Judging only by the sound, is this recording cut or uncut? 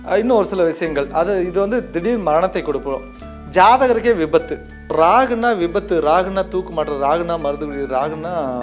cut